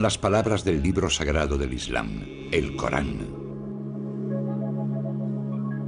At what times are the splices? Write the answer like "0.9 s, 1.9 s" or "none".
2.3 s